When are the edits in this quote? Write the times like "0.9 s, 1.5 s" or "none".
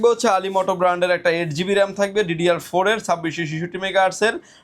none